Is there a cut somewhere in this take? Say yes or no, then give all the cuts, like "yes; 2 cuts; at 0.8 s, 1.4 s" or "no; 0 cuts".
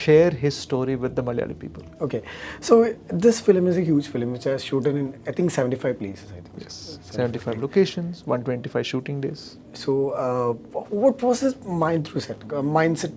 no; 0 cuts